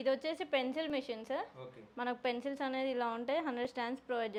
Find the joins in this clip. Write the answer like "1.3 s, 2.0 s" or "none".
none